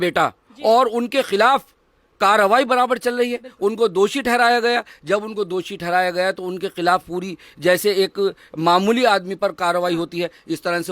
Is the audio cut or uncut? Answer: uncut